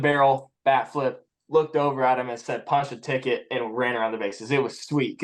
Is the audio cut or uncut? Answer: uncut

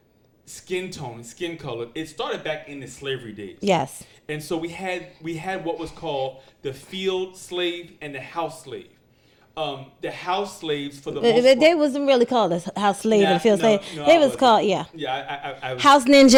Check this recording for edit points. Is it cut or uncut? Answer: uncut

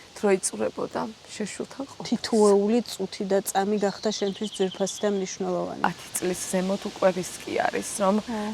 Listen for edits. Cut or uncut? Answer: cut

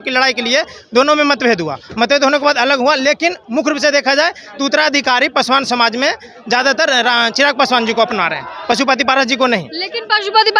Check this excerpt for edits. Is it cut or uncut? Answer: uncut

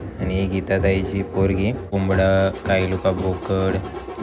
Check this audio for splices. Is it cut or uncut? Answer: cut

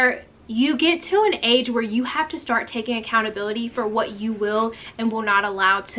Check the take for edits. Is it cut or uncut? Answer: uncut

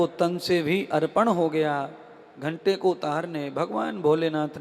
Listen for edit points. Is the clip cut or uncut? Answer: uncut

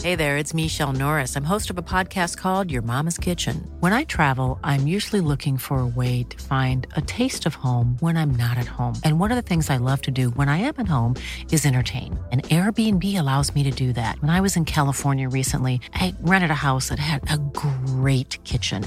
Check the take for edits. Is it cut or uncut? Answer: uncut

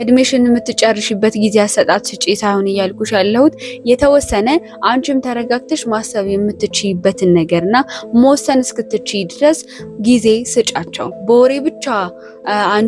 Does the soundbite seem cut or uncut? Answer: cut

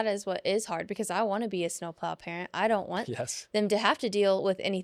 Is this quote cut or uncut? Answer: uncut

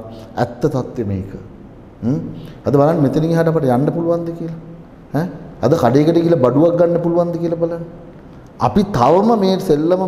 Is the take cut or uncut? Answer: uncut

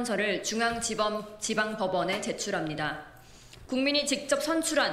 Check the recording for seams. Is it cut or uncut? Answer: cut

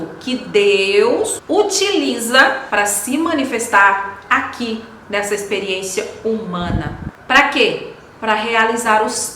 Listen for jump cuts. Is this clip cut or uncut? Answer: cut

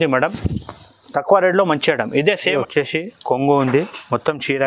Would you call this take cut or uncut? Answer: cut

